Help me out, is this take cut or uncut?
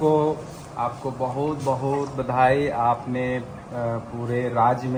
uncut